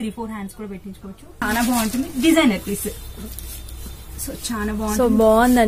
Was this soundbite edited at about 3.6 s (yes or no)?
no